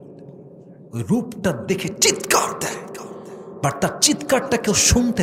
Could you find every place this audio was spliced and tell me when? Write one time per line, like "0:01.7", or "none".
none